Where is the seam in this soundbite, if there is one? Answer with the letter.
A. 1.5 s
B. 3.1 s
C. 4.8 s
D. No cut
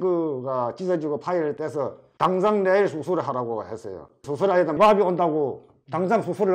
C